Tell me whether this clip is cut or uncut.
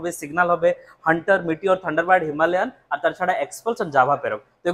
uncut